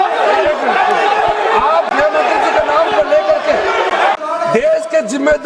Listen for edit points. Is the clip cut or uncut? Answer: cut